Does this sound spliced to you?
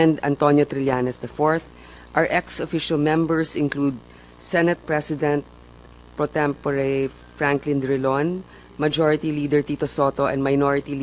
yes; 1 cut; at 1.4 s

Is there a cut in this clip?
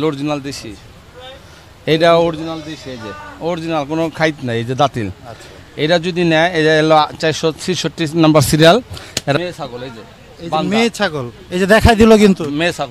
yes; 1 cut; at 9.4 s

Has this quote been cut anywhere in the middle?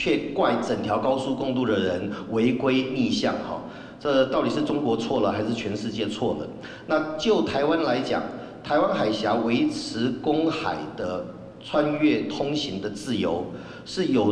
no; 0 cuts

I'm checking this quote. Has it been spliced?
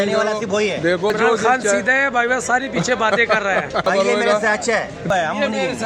yes; 3 cuts; at 1.1 s, 3.9 s, 5.1 s

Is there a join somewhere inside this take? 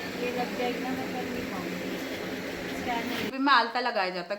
yes; 1 cut; at 3.3 s

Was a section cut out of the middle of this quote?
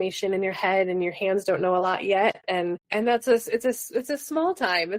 yes; 1 cut; at 2.8 s

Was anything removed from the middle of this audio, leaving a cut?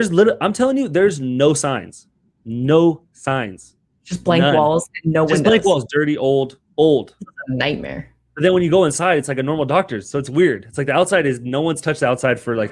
no; 0 cuts

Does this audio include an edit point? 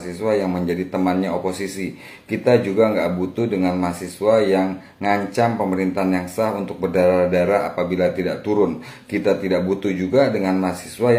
no; 0 cuts

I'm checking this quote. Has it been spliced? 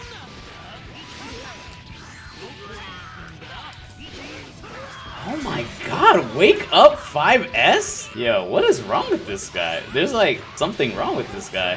yes; 2 cuts; at 8.0 s, 10.5 s

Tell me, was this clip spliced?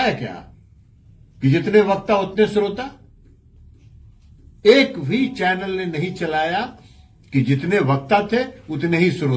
no; 0 cuts

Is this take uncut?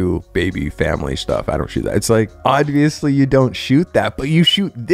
no; 1 cut; at 2.3 s

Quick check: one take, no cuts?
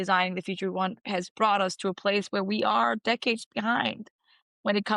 yes; 0 cuts

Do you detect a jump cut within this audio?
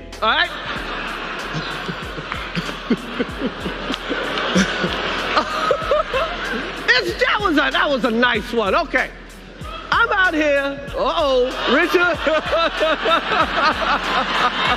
yes; 2 cuts; at 7.3 s, 12.9 s

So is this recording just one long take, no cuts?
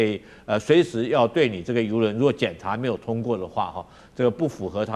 yes; 0 cuts

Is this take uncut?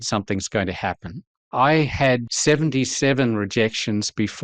no; 2 cuts; at 1.4 s, 2.2 s

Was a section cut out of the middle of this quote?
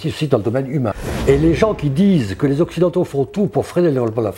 yes; 1 cut; at 1.1 s

